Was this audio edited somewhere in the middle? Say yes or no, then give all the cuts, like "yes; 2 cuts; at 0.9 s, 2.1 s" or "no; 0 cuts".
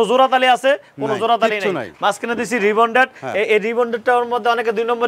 no; 0 cuts